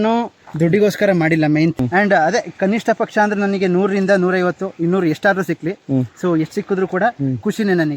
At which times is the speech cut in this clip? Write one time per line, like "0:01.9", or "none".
0:01.7

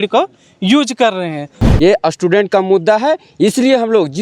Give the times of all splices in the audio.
0:01.6

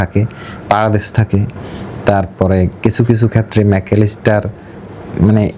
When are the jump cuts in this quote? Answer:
none

